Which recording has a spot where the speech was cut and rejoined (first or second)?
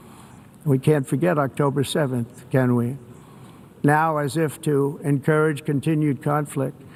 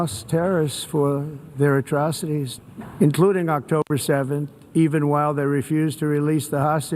second